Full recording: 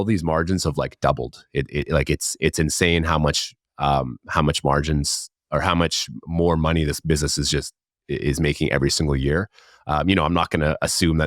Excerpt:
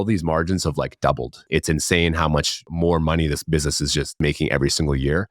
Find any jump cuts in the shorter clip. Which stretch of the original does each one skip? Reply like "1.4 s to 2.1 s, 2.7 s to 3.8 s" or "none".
1.4 s to 2.3 s, 3.5 s to 6.2 s, 7.7 s to 8.4 s